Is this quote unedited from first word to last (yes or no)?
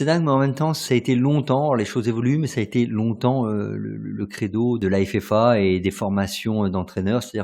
no